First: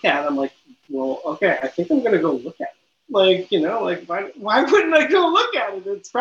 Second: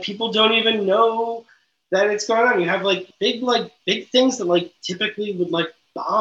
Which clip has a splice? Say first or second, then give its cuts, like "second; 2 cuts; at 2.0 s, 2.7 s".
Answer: second; 1 cut; at 3.1 s